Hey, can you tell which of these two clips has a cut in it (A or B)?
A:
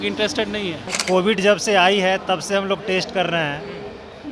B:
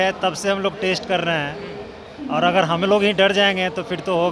A